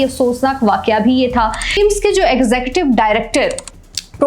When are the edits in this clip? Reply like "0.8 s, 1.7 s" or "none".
1.8 s